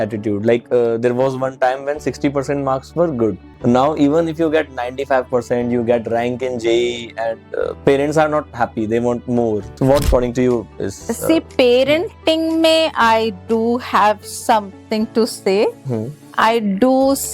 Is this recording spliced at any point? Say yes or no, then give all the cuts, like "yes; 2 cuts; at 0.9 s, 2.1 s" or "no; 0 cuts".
yes; 2 cuts; at 3.5 s, 9.7 s